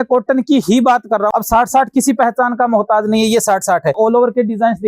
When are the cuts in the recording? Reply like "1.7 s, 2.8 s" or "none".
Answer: 1.3 s, 4.0 s